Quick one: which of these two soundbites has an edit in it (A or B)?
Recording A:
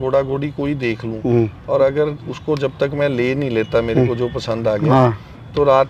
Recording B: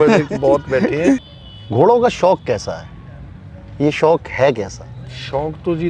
B